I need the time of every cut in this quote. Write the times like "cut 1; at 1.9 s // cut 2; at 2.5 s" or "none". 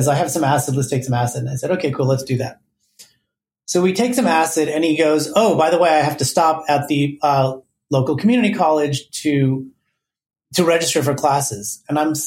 none

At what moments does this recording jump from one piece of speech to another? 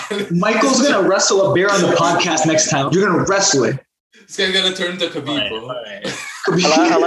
cut 1; at 2.9 s

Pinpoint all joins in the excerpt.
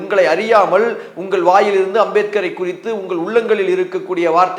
none

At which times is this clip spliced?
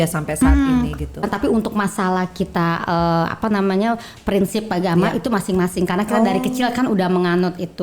cut 1; at 1.3 s

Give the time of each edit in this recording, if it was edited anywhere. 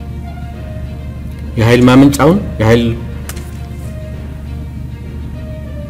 none

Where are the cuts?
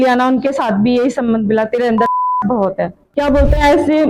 cut 1; at 3.0 s

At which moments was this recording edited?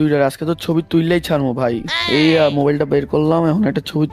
cut 1; at 1.9 s

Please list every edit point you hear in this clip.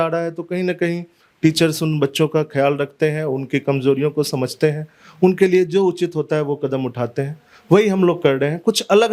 none

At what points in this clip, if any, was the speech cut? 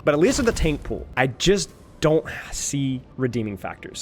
cut 1; at 1.0 s // cut 2; at 3.1 s

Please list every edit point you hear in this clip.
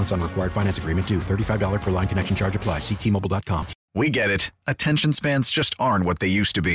cut 1; at 3.8 s

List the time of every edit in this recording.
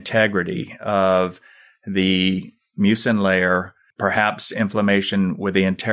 cut 1; at 3.8 s

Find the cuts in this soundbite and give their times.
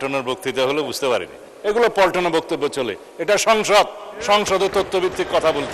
cut 1; at 1.5 s

